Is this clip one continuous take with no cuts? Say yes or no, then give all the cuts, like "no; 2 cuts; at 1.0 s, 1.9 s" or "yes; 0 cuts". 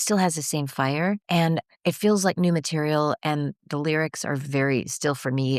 no; 1 cut; at 1.2 s